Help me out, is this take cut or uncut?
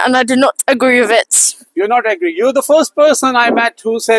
uncut